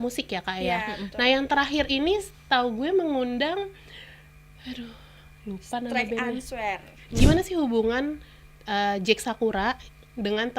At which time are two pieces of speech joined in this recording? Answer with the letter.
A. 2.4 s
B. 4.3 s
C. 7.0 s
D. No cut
C